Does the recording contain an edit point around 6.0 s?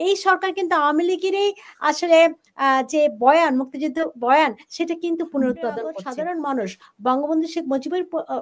yes; 1 cut; at 6.0 s

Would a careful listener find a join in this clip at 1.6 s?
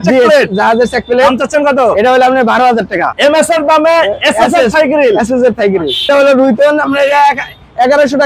no; 2 cuts; at 3.1 s, 6.1 s

